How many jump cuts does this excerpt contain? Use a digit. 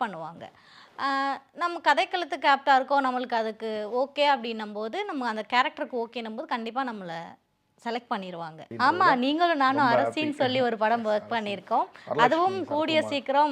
1